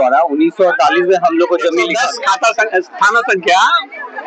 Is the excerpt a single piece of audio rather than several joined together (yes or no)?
no